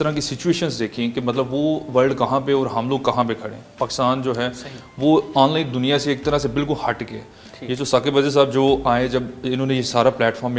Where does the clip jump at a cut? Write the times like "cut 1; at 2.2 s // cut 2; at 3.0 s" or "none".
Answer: none